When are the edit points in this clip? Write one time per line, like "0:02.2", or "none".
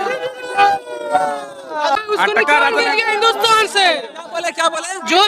0:01.9